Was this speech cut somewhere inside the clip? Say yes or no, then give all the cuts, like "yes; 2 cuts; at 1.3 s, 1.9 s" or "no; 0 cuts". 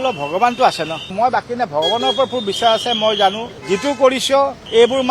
no; 0 cuts